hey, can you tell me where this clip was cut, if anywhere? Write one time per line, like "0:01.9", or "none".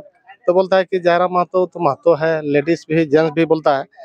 none